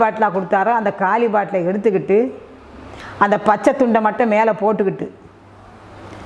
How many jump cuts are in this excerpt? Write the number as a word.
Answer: zero